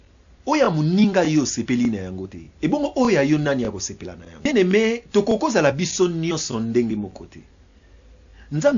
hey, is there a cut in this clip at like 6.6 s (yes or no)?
no